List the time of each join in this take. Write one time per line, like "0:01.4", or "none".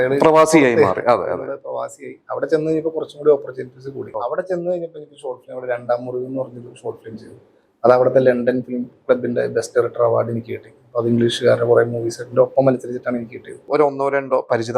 0:04.1
0:13.6